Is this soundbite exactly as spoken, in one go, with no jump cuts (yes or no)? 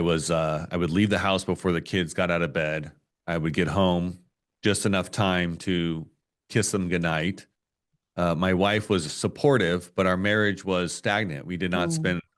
yes